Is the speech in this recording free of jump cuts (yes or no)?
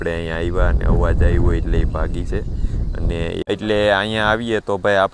no